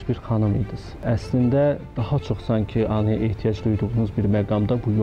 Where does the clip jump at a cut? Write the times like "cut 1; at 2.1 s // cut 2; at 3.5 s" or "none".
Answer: cut 1; at 1.0 s